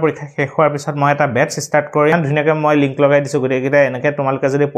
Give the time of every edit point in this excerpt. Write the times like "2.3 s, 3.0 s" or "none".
2.1 s